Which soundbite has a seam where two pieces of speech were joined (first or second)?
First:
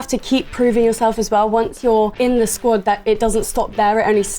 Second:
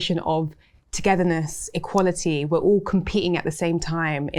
first